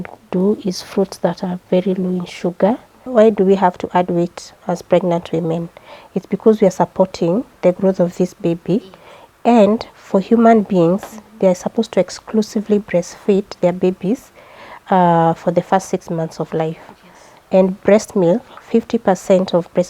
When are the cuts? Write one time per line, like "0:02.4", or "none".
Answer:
0:03.1